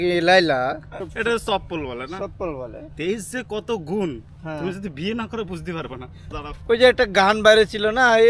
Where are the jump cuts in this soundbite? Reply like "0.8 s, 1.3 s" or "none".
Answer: 0.9 s, 6.2 s